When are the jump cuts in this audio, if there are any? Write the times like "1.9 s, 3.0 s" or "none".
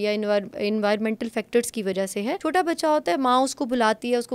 2.4 s